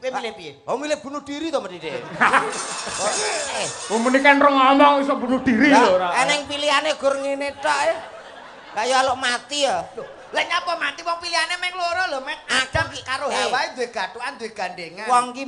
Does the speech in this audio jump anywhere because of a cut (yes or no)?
no